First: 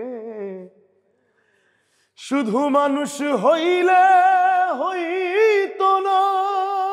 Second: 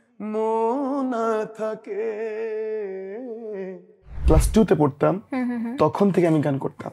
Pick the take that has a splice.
second; 1 cut; at 4.2 s

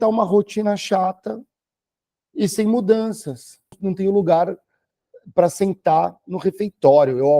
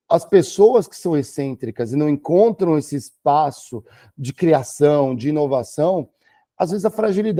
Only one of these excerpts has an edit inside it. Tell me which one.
first; 1 cut; at 3.8 s

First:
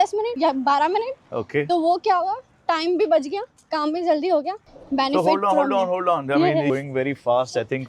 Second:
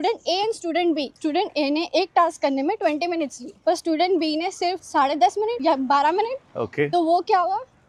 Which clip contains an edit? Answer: first; 2 cuts; at 4.6 s, 6.7 s

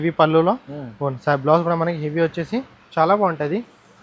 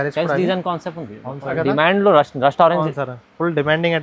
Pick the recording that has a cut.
second; 1 cut; at 1.5 s

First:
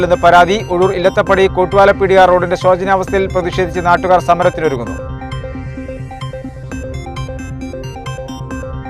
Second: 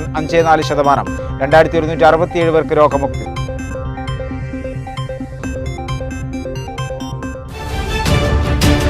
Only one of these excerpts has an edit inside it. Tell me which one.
second; 1 cut; at 7.5 s

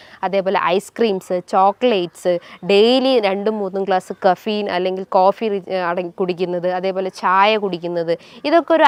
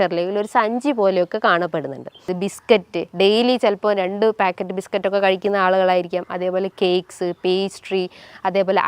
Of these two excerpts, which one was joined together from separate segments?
second; 1 cut; at 2.3 s

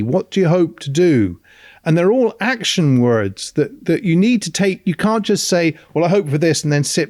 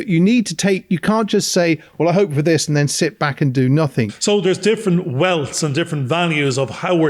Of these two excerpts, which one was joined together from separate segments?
second; 1 cut; at 4.1 s

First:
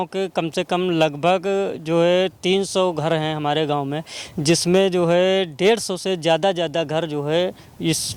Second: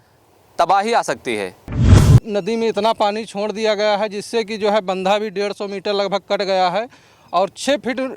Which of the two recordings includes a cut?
second; 1 cut; at 1.9 s

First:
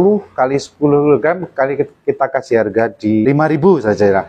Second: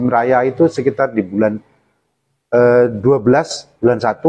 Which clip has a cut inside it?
first; 1 cut; at 3.2 s

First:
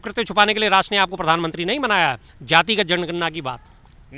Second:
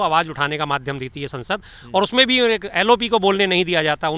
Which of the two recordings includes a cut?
first; 1 cut; at 2.3 s

